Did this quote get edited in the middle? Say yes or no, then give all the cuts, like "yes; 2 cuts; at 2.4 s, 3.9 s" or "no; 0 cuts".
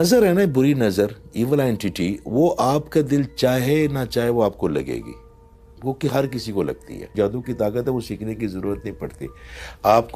yes; 1 cut; at 7.1 s